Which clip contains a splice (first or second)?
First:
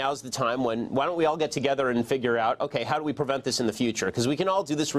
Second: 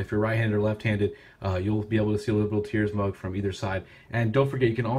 second